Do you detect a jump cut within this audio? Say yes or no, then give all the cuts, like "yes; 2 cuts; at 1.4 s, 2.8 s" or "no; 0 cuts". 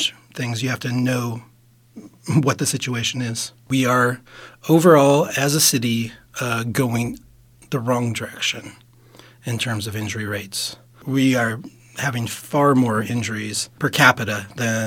yes; 3 cuts; at 3.6 s, 11.0 s, 13.8 s